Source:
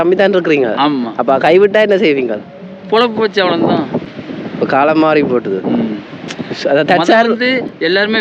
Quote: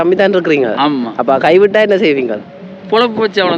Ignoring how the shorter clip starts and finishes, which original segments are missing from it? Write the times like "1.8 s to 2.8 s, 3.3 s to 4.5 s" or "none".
none